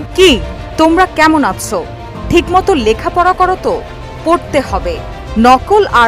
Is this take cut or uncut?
uncut